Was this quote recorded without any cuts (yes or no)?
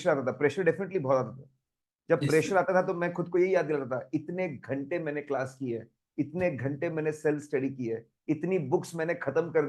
yes